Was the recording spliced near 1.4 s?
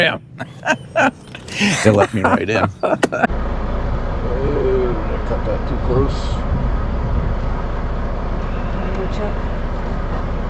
no; 1 cut; at 3.3 s

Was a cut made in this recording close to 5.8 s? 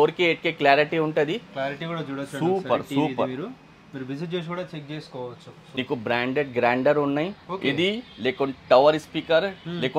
yes; 1 cut; at 5.8 s

